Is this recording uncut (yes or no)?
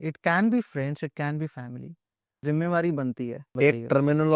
no